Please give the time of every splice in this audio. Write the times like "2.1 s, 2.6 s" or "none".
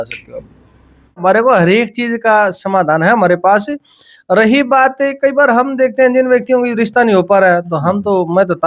1.2 s